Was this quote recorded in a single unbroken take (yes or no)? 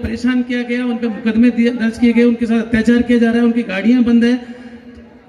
yes